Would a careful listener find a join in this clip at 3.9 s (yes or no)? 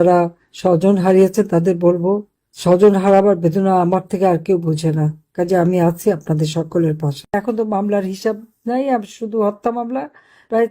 no